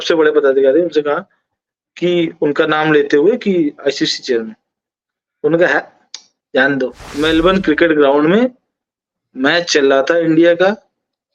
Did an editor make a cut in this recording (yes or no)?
yes